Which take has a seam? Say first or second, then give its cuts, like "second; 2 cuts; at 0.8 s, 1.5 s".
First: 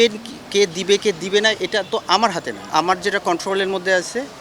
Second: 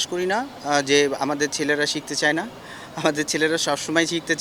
first; 1 cut; at 2.7 s